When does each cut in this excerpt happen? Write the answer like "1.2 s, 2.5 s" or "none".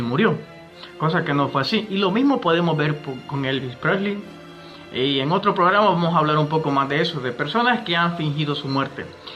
6.1 s